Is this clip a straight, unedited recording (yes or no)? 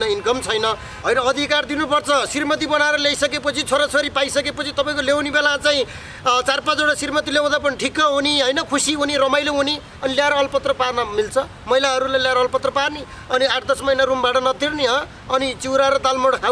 no